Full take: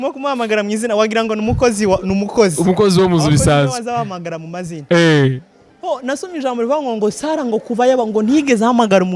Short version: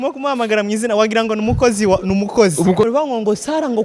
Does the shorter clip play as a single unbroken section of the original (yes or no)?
no